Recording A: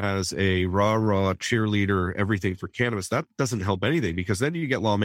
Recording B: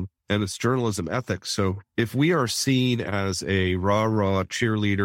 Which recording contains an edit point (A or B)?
B